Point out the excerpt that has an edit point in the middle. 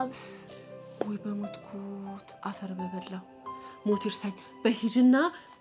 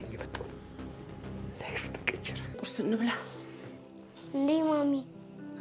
second; 1 cut; at 2.6 s

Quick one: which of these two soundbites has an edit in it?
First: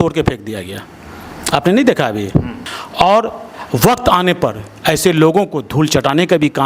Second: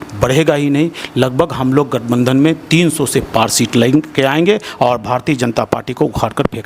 first; 1 cut; at 2.5 s

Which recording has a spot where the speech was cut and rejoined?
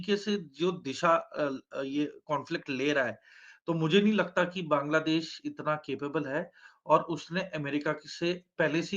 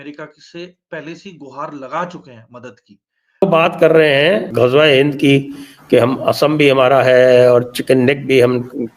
second; 2 cuts; at 3.4 s, 4.5 s

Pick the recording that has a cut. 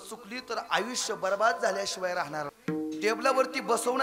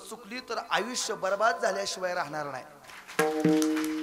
first; 1 cut; at 2.5 s

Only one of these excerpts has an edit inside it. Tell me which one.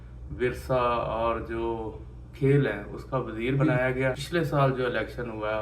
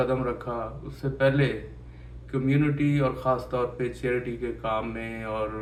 first; 1 cut; at 3.8 s

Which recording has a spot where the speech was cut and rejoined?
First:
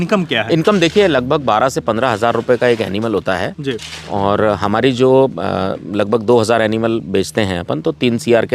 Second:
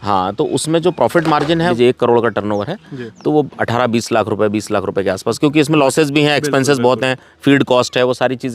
second; 1 cut; at 1.7 s

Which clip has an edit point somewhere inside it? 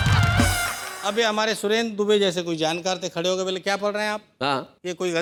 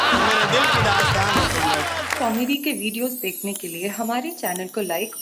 second; 1 cut; at 2.1 s

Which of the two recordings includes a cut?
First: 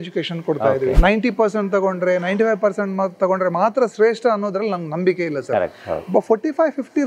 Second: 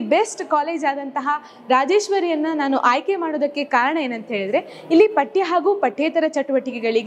first; 1 cut; at 1.0 s

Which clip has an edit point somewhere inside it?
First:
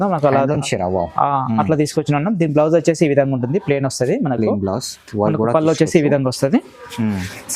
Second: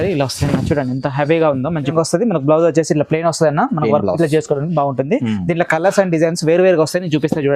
second; 1 cut; at 1.9 s

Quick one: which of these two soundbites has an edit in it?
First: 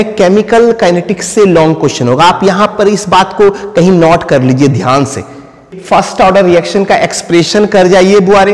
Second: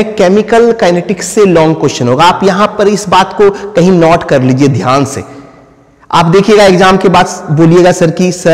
first; 1 cut; at 5.7 s

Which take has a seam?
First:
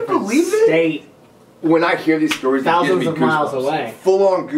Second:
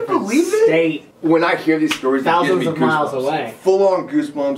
second; 1 cut; at 1.1 s

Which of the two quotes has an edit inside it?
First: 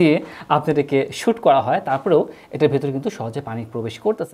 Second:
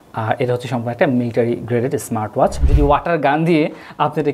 second; 1 cut; at 2.6 s

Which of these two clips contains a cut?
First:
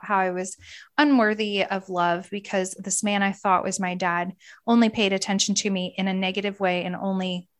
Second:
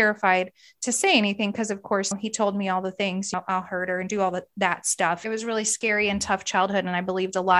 second; 3 cuts; at 2.1 s, 3.3 s, 5.2 s

